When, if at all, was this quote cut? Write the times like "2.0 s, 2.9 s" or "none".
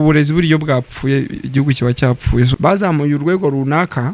2.5 s